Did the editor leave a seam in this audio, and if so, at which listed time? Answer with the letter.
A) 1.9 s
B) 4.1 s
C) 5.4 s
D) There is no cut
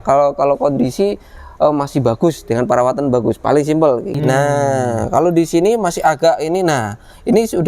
B